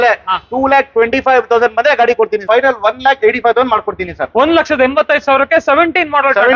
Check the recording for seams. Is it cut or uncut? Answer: cut